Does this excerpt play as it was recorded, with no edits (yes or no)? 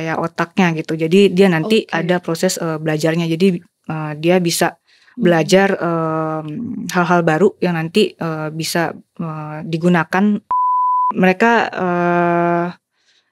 no